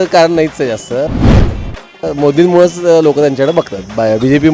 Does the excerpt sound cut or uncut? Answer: uncut